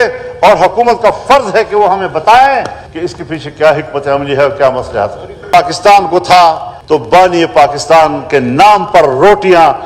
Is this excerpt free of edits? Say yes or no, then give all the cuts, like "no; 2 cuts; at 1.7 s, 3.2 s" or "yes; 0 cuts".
no; 1 cut; at 5.5 s